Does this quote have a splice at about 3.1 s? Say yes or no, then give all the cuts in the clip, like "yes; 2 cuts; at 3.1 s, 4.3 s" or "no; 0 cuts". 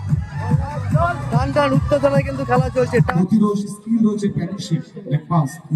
yes; 1 cut; at 3.1 s